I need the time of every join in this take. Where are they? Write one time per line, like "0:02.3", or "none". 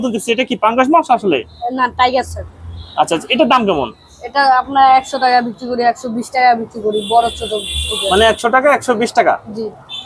none